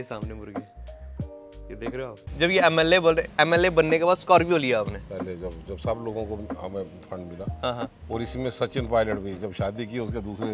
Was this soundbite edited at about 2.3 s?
yes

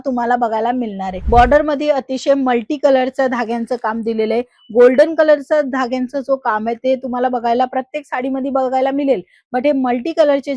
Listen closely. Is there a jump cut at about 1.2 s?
yes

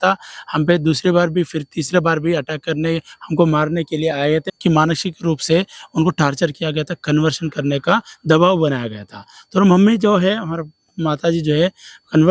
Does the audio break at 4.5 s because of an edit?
yes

